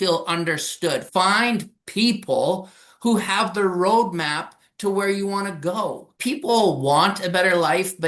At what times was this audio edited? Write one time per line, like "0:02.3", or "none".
0:01.1
0:06.1

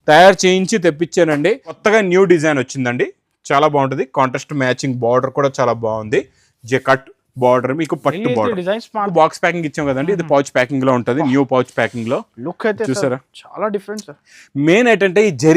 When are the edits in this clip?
0:01.8
0:09.1

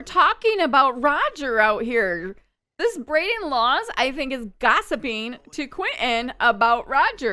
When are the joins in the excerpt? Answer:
none

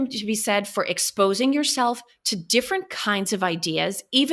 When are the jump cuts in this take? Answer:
none

